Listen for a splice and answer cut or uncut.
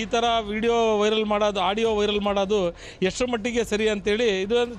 uncut